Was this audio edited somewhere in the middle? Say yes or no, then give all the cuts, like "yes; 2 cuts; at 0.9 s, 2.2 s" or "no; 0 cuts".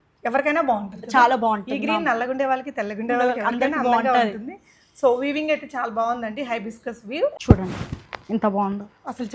yes; 1 cut; at 7.3 s